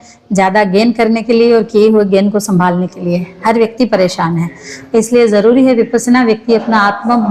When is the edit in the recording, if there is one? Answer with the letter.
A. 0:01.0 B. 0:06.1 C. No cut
C